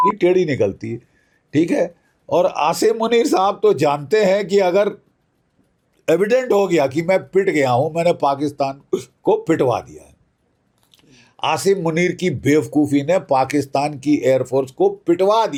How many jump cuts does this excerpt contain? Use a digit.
0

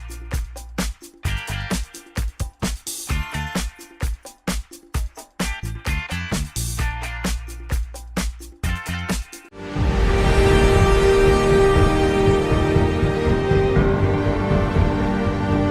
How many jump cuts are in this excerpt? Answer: 1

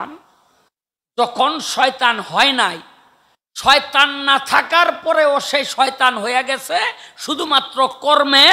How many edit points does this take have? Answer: 0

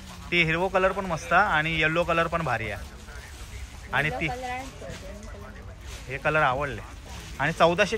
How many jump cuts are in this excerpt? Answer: 0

